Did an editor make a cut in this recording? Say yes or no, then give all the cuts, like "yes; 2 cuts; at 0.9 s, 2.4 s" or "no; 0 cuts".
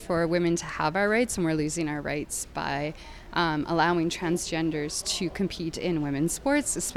no; 0 cuts